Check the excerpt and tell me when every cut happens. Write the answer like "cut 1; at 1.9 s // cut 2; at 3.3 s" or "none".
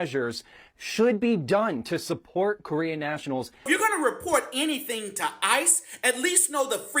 cut 1; at 3.7 s